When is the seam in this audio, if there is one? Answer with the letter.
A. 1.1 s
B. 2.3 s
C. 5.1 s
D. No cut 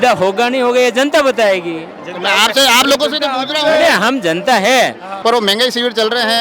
C